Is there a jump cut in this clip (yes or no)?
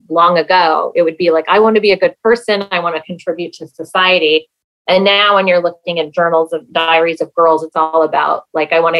no